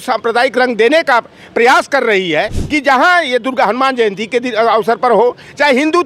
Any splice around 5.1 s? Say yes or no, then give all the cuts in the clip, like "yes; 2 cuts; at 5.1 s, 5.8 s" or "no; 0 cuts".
no; 1 cut; at 2.6 s